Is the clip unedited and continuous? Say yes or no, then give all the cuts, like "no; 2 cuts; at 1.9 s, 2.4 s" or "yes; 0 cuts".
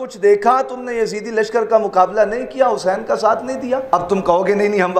no; 1 cut; at 3.8 s